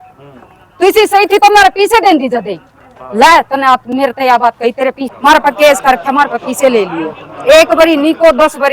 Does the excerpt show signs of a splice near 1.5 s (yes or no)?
no